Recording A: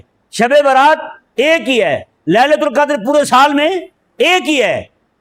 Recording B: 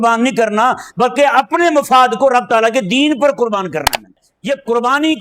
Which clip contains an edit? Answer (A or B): B